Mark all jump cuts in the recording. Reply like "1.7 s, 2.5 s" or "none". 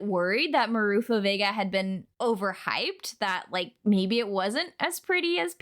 2.1 s